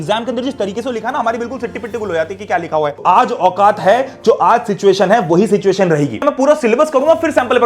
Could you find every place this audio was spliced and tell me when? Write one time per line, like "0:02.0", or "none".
0:03.0
0:06.2